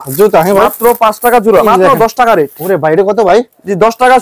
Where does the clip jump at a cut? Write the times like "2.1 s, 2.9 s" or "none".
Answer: 1.6 s